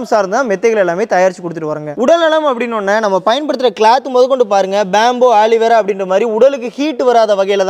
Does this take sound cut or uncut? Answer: uncut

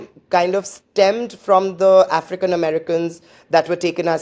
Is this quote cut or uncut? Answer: uncut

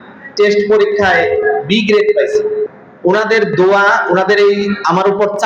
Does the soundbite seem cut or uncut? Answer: cut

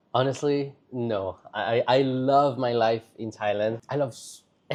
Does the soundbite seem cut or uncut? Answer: uncut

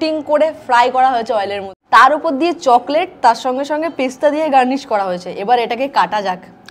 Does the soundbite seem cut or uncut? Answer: uncut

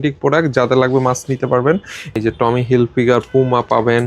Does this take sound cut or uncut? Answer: cut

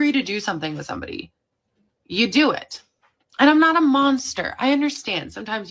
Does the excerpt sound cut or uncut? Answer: uncut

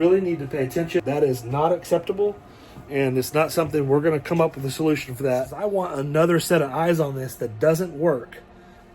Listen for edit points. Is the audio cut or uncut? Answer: cut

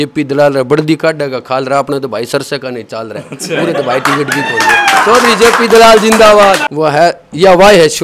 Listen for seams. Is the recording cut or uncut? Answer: cut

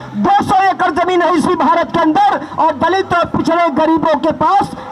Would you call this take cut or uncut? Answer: uncut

